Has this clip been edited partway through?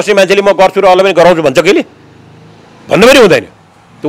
no; 0 cuts

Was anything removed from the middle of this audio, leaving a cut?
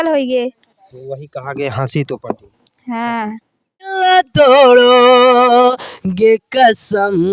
yes; 1 cut; at 3.9 s

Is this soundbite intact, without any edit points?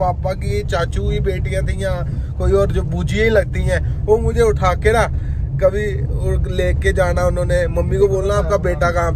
yes; 0 cuts

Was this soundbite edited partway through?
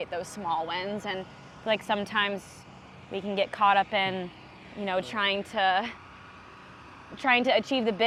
no; 0 cuts

